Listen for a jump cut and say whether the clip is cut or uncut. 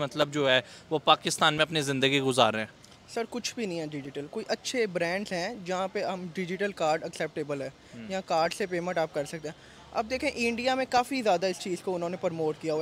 uncut